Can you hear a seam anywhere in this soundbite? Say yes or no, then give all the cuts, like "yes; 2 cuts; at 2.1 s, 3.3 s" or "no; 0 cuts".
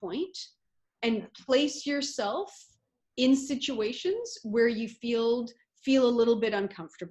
no; 0 cuts